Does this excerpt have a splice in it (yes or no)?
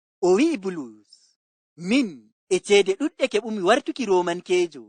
yes